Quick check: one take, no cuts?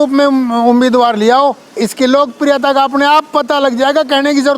no; 1 cut; at 1.7 s

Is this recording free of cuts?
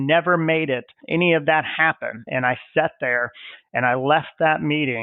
no; 2 cuts; at 0.9 s, 2.3 s

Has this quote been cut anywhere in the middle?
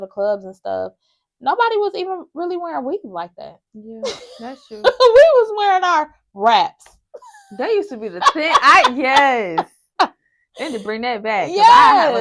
no; 0 cuts

